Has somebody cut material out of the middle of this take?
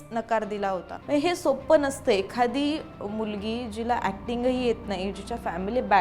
yes; 1 cut; at 0.9 s

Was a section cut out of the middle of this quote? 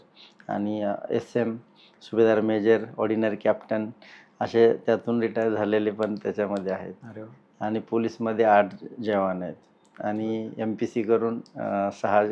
no; 0 cuts

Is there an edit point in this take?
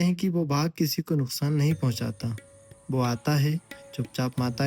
no; 0 cuts

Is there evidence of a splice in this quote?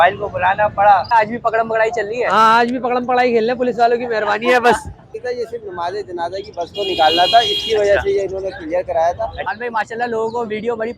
yes; 3 cuts; at 1.1 s, 5.1 s, 9.5 s

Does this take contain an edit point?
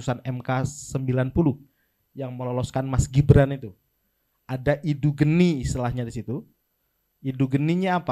no; 0 cuts

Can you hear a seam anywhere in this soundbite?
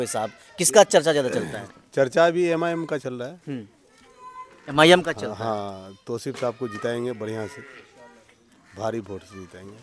no; 0 cuts

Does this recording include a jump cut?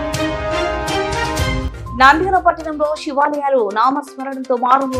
yes; 1 cut; at 1.6 s

